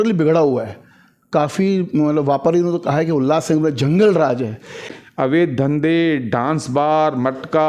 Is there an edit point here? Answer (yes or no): yes